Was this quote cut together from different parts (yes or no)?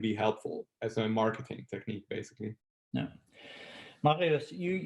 no